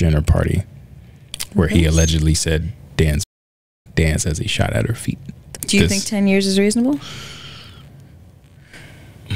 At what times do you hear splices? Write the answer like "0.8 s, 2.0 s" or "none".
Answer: 5.4 s